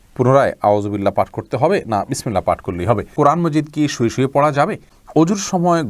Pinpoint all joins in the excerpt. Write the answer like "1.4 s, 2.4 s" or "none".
3.1 s, 4.9 s